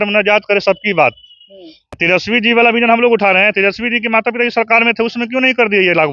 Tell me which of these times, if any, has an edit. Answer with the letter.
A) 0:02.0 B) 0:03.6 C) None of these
A